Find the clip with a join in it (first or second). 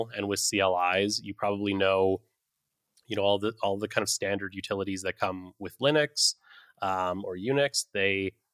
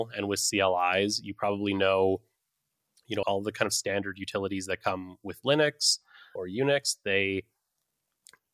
second